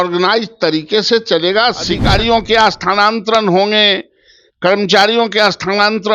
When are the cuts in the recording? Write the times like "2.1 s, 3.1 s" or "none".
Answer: 2.0 s